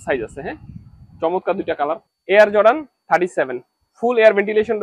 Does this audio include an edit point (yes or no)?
yes